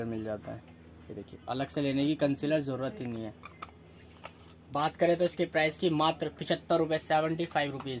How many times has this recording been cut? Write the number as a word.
zero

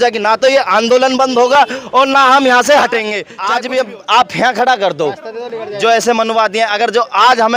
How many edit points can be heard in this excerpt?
one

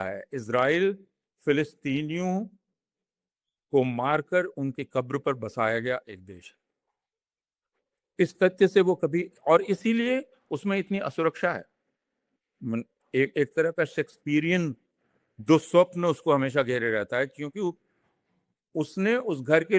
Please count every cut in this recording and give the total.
zero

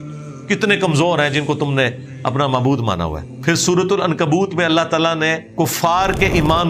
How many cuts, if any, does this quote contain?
two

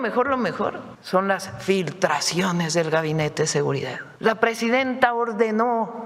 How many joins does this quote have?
two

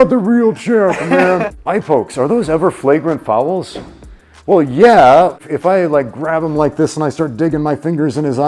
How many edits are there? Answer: two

